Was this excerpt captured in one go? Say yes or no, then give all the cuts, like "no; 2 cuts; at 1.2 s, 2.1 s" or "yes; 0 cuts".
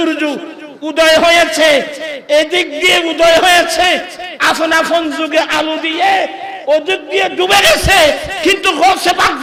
yes; 0 cuts